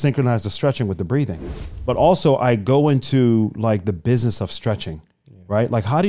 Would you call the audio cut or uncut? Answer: cut